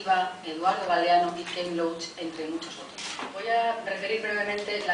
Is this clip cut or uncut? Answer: cut